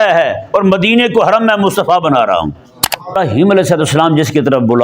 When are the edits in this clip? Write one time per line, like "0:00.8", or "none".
0:03.2